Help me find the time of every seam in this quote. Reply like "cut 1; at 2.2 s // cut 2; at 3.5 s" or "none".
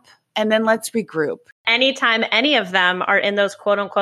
cut 1; at 1.6 s